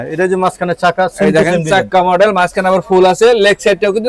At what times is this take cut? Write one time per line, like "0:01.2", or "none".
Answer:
none